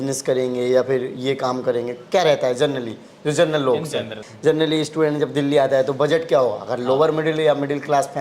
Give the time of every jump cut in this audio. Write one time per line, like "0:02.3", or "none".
0:04.2

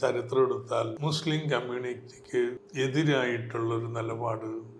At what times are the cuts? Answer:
0:01.0
0:02.6

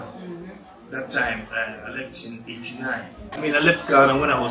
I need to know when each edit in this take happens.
0:03.4

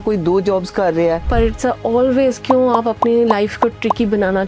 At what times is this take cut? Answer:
0:01.2

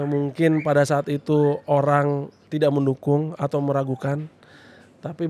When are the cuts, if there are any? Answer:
0:02.4

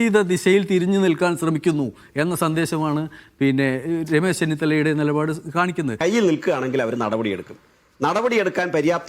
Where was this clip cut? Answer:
0:05.9

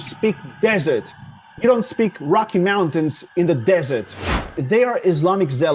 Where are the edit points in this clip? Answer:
0:04.6

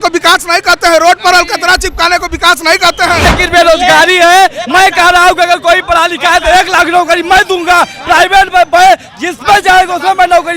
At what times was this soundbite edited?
0:03.3

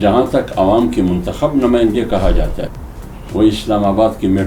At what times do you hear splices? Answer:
0:02.7

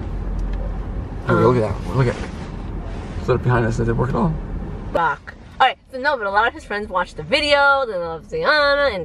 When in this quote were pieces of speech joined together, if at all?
0:04.9

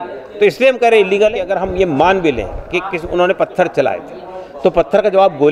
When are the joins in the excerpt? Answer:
0:01.5

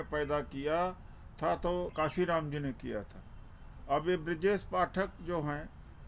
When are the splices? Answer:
0:01.9

